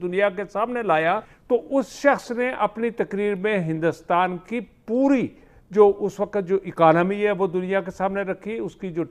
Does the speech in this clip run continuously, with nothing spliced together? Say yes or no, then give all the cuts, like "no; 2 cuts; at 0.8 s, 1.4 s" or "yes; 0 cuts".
no; 1 cut; at 1.3 s